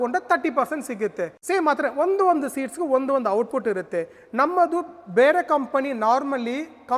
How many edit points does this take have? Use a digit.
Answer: 0